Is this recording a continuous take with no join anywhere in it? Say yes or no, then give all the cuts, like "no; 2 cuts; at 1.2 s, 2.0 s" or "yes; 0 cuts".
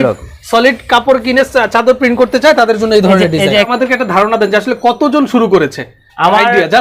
no; 1 cut; at 3.7 s